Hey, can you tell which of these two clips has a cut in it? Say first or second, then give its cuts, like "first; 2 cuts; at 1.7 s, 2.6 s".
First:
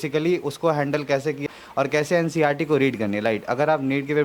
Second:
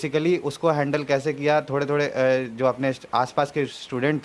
first; 1 cut; at 1.4 s